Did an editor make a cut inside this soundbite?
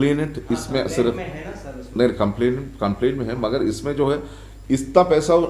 no; 0 cuts

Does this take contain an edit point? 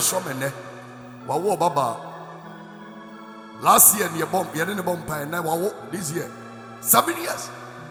no; 0 cuts

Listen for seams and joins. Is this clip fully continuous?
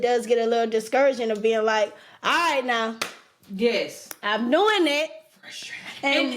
yes; 0 cuts

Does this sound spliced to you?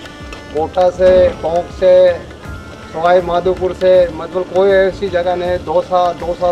no; 0 cuts

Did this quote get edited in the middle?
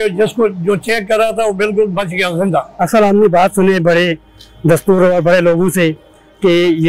yes; 1 cut; at 2.7 s

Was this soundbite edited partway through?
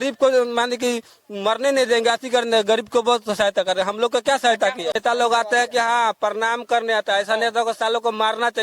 yes; 1 cut; at 5.0 s

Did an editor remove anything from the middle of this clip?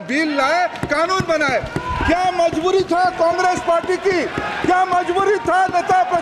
no; 0 cuts

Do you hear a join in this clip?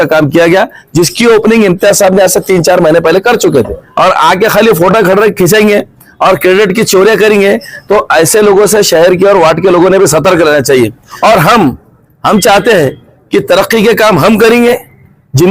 yes; 2 cuts; at 3.8 s, 11.0 s

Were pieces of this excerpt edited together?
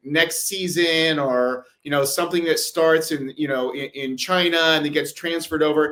no; 0 cuts

